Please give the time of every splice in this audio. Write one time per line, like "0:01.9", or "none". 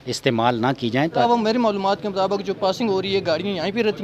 0:01.2